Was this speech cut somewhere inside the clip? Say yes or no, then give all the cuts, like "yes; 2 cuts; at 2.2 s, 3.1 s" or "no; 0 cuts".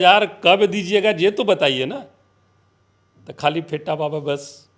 no; 0 cuts